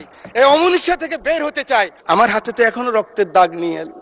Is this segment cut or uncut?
cut